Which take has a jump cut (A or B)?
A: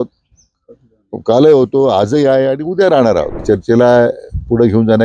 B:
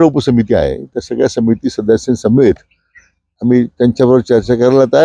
A